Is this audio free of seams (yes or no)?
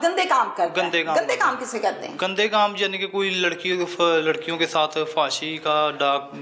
yes